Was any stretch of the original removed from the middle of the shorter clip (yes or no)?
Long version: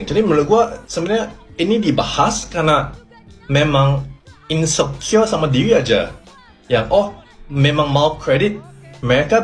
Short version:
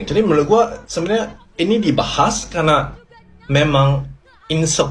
no